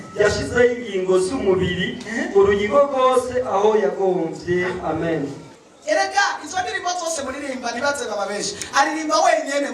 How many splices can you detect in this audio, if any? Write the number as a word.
one